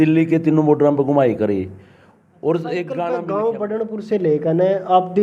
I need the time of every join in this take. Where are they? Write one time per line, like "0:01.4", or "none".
0:03.2